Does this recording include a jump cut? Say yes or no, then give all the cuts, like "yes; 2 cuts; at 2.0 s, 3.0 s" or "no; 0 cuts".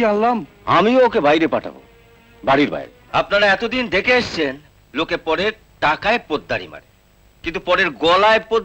yes; 1 cut; at 2.9 s